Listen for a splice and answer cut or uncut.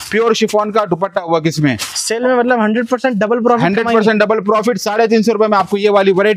uncut